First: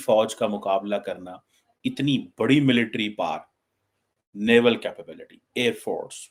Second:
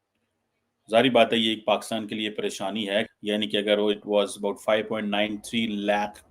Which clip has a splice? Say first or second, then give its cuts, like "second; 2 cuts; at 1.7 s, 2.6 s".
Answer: second; 1 cut; at 3.1 s